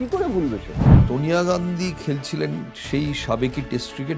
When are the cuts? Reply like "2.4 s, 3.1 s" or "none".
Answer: 1.0 s